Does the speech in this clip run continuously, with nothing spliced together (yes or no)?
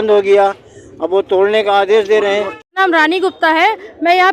no